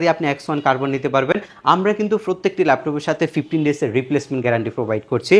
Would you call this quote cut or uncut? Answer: uncut